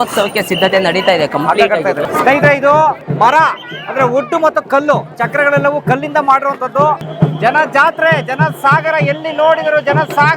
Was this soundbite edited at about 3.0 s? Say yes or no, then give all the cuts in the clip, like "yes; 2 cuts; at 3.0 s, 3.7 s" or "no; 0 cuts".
yes; 3 cuts; at 2.0 s, 3.0 s, 7.1 s